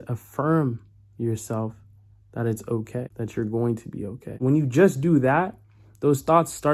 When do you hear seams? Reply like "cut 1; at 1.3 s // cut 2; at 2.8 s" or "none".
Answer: cut 1; at 3.1 s // cut 2; at 4.4 s